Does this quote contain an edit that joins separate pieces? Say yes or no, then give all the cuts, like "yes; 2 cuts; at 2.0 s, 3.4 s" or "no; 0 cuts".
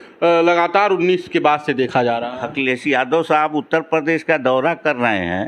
no; 0 cuts